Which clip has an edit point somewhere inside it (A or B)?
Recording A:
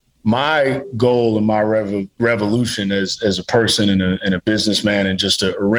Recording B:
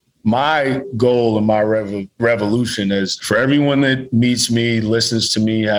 B